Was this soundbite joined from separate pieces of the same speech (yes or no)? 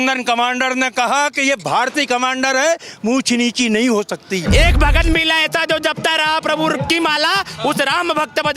yes